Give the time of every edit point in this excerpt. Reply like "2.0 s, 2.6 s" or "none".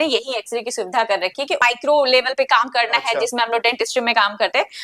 1.6 s